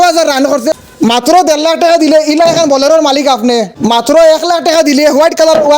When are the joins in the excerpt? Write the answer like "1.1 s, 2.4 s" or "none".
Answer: 0.8 s, 3.7 s